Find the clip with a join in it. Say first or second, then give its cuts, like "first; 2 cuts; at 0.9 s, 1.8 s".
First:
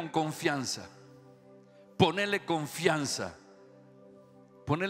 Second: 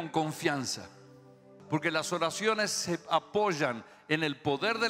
second; 1 cut; at 1.5 s